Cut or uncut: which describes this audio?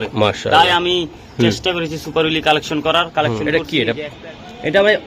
cut